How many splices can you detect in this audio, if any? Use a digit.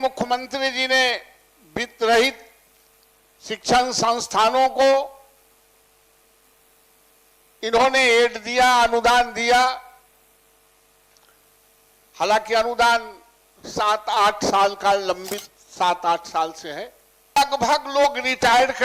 1